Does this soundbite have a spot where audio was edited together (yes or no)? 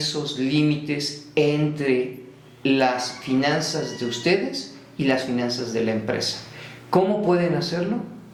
no